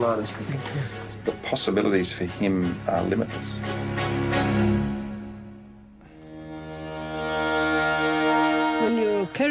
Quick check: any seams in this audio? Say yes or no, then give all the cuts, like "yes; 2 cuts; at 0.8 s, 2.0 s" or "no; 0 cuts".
no; 0 cuts